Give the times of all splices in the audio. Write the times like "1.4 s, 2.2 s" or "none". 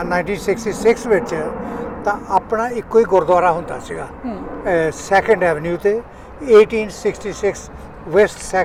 none